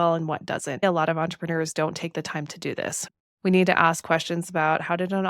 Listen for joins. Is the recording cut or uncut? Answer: cut